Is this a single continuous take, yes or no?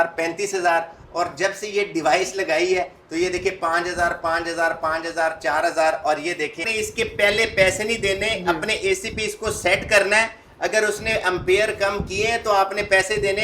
no